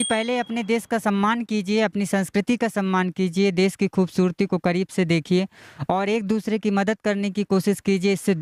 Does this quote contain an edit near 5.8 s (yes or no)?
no